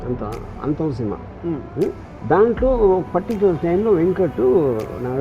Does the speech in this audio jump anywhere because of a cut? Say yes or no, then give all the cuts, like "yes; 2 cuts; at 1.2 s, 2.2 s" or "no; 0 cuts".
yes; 1 cut; at 2.1 s